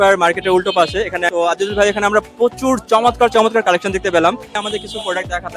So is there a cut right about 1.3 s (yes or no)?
yes